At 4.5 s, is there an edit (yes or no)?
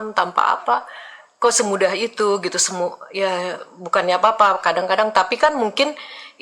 no